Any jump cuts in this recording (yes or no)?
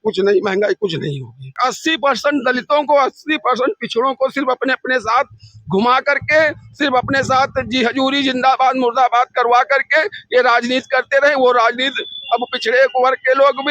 yes